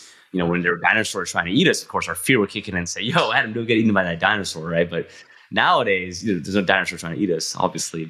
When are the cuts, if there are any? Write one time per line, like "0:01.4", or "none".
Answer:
none